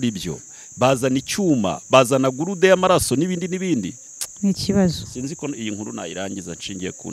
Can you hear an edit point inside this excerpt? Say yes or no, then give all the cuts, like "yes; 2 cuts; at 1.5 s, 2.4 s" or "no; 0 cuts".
yes; 1 cut; at 4.0 s